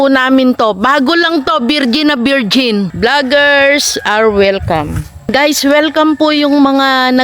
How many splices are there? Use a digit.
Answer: 2